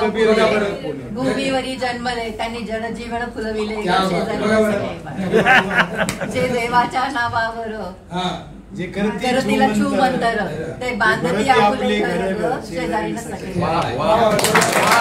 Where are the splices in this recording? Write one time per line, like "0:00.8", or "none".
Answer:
none